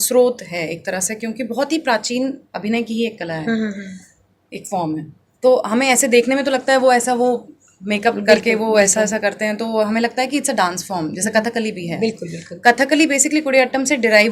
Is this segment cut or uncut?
uncut